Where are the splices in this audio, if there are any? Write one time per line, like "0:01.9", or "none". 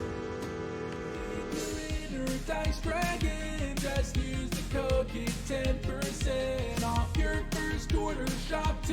0:01.7